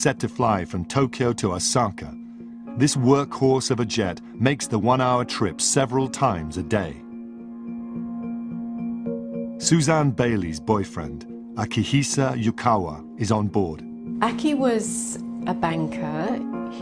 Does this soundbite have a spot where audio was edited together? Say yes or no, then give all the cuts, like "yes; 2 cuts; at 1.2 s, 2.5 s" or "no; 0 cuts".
no; 0 cuts